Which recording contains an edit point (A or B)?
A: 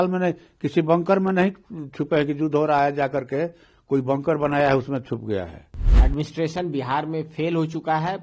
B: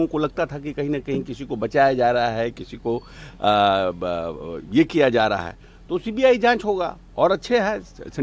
A